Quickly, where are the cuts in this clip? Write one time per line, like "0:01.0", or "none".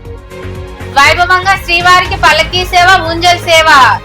0:00.9